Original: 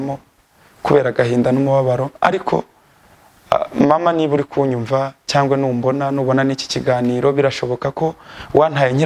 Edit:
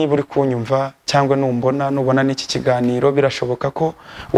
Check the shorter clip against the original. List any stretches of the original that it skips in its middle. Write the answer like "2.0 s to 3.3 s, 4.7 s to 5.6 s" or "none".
none